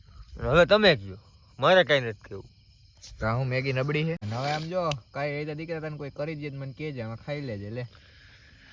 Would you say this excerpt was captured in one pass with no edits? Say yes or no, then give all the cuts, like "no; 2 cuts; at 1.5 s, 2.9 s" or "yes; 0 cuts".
no; 1 cut; at 4.3 s